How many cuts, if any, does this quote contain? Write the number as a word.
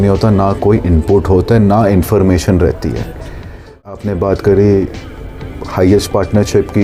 one